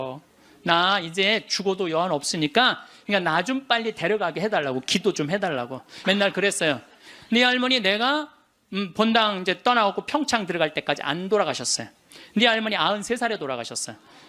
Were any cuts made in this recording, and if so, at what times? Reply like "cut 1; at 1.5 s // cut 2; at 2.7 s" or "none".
cut 1; at 2.9 s // cut 2; at 5.9 s